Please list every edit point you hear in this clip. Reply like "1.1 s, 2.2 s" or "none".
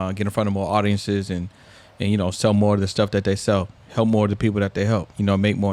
none